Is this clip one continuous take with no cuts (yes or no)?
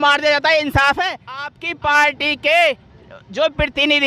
no